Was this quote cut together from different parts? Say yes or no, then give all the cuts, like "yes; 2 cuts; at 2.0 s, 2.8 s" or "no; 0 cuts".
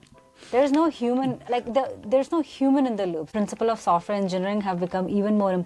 yes; 1 cut; at 3.3 s